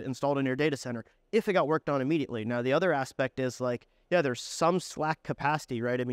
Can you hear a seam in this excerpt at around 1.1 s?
no; 0 cuts

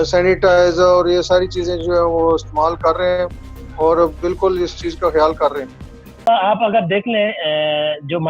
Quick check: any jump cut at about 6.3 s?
yes; 1 cut; at 6.3 s

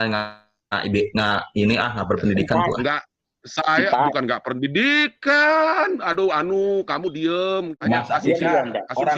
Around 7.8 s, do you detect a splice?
yes; 1 cut; at 7.8 s

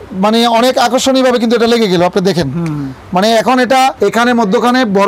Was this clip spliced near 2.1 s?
no; 1 cut; at 3.9 s

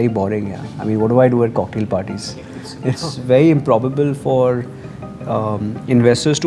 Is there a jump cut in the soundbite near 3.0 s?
yes; 1 cut; at 3.0 s

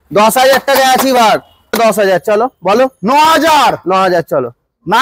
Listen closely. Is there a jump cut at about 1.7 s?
yes; 1 cut; at 1.7 s

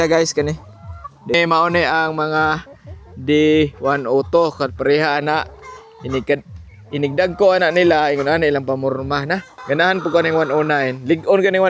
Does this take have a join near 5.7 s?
no; 2 cuts; at 1.3 s, 9.5 s

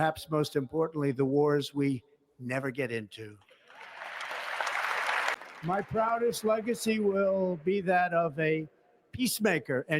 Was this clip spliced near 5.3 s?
yes; 1 cut; at 5.3 s

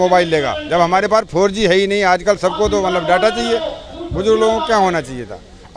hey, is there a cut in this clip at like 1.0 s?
no; 1 cut; at 3.7 s

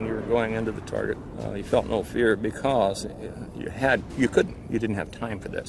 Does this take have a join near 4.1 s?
no; 1 cut; at 1.4 s

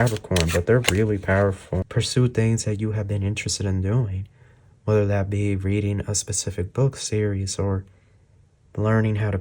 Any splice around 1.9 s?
yes; 1 cut; at 1.9 s

